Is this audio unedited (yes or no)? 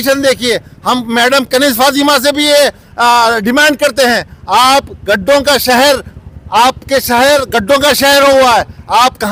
yes